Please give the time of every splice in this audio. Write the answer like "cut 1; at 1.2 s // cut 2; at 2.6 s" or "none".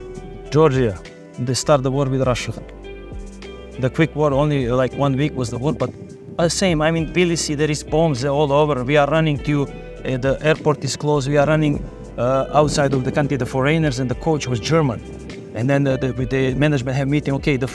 none